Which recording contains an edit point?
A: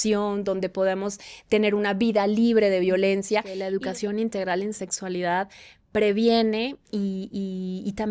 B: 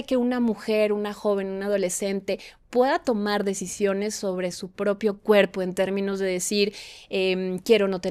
A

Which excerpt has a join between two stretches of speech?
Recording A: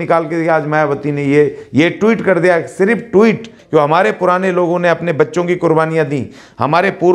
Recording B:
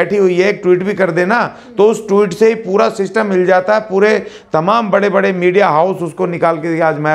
A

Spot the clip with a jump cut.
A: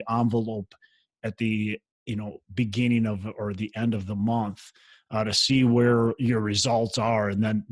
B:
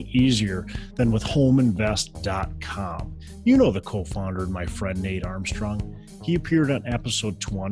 A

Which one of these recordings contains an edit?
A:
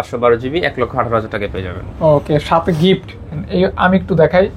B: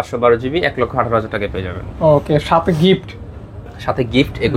A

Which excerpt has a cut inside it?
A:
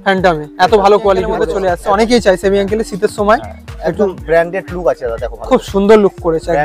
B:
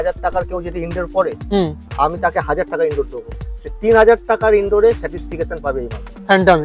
A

